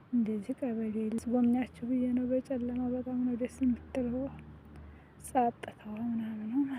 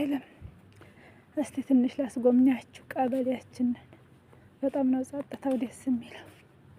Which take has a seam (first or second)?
first